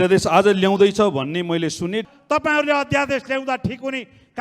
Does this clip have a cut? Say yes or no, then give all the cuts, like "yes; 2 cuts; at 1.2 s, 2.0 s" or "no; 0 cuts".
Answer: yes; 1 cut; at 2.1 s